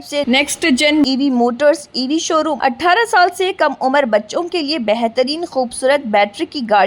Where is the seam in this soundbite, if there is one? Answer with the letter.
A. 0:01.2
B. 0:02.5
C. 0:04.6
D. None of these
B